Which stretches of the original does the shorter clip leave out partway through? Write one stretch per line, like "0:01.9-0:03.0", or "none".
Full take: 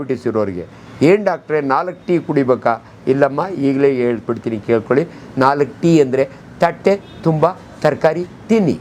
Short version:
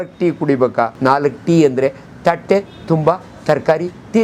0:02.8-0:05.3